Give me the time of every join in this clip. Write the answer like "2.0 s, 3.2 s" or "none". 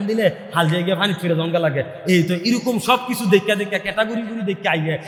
none